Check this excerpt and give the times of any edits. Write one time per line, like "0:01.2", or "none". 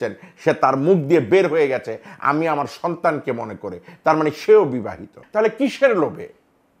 0:05.2